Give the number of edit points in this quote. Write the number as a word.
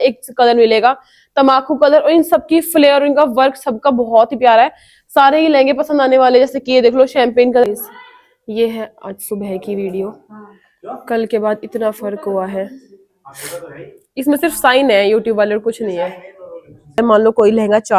two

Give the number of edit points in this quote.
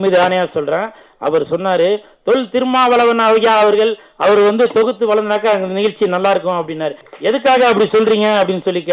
one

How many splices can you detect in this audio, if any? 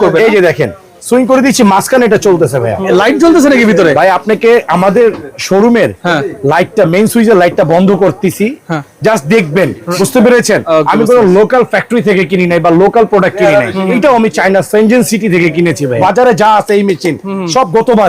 four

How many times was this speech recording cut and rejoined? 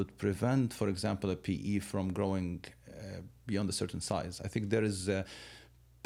zero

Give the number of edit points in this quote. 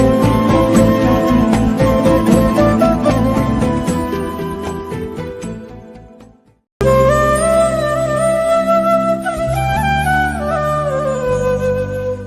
zero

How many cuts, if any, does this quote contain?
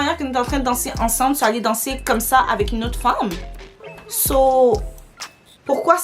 zero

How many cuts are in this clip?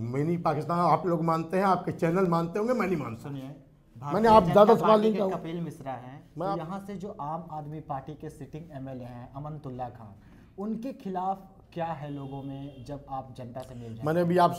one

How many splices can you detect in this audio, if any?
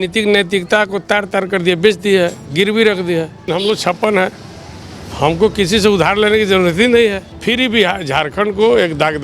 two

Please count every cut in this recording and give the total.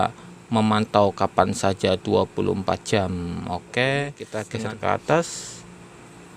one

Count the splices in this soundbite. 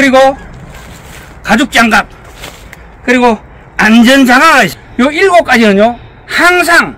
one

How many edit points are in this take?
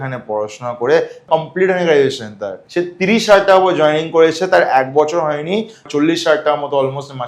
three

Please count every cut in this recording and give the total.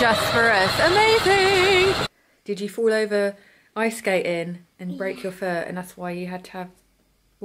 one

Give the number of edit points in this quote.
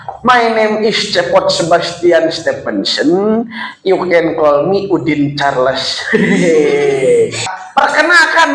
one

